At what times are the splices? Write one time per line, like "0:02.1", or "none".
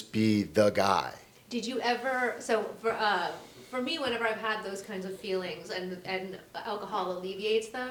none